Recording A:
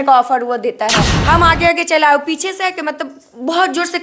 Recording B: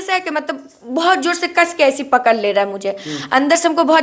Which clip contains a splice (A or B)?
A